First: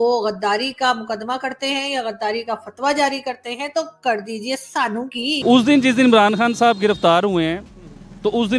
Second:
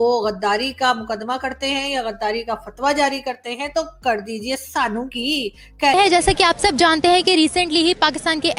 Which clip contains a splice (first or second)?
first